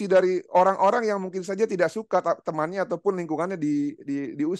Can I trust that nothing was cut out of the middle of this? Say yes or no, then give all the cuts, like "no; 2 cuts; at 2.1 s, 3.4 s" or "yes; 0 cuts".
yes; 0 cuts